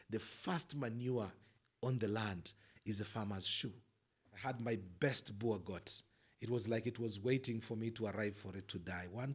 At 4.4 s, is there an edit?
yes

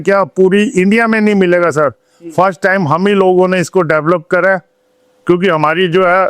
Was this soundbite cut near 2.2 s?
no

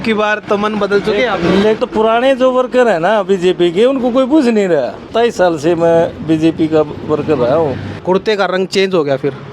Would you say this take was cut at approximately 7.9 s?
yes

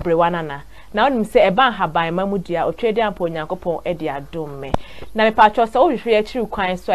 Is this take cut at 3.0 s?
yes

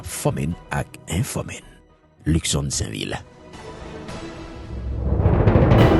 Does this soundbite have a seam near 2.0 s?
no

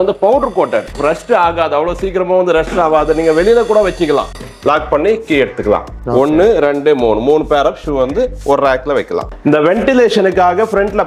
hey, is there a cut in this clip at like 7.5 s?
no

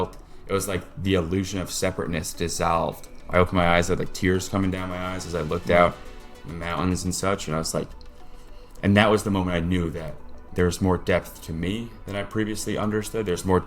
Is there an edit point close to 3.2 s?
yes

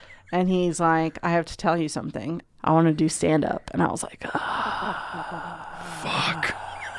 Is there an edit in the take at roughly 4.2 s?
no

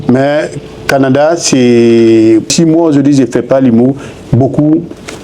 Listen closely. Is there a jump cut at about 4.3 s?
no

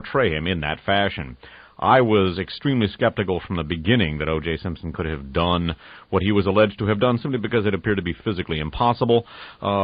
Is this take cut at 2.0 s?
no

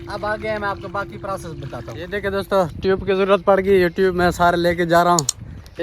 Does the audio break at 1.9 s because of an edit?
yes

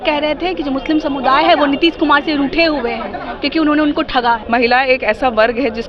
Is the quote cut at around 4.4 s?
yes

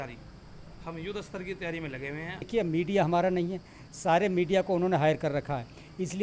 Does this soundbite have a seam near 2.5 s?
yes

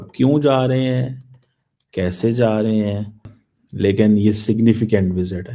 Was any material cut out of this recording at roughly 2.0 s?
no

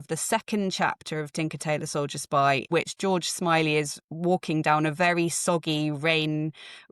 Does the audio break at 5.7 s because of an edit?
no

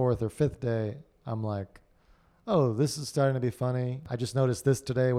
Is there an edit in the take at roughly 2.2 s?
no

